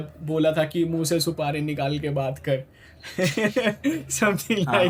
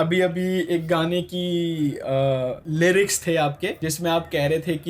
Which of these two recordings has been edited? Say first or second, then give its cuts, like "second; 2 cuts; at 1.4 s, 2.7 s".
second; 2 cuts; at 2.6 s, 3.8 s